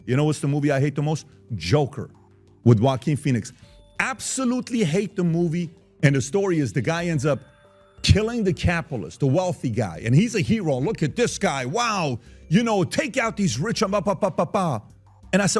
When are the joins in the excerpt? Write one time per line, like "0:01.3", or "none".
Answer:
0:05.8